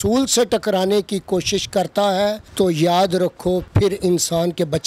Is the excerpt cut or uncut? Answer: cut